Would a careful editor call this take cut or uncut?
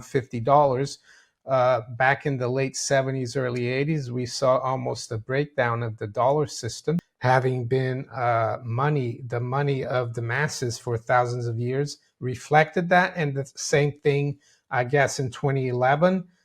cut